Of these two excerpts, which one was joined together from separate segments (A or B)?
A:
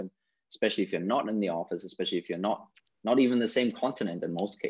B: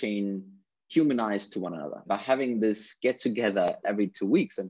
B